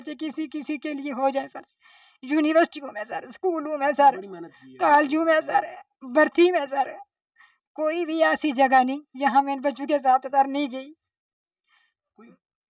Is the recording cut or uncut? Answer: uncut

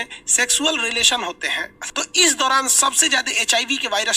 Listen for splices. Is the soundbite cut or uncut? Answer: cut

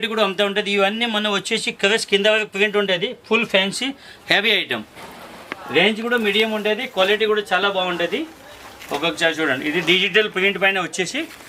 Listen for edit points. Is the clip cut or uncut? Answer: uncut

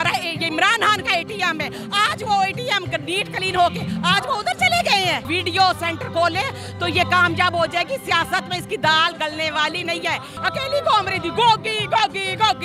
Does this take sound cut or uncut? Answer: cut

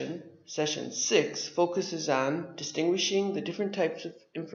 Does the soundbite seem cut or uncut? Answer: cut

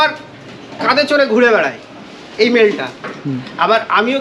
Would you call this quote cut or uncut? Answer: uncut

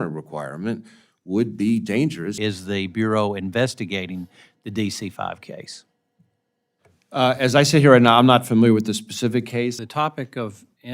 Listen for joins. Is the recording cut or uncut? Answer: cut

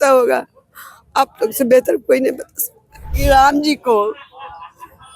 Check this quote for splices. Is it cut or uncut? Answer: cut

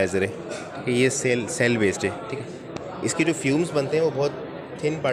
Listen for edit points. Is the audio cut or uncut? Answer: uncut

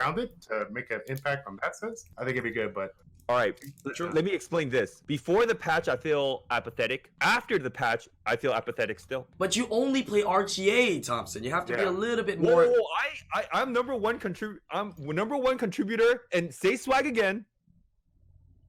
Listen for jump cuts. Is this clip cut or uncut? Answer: cut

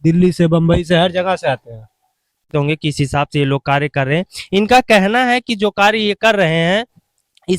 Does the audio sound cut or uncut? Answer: cut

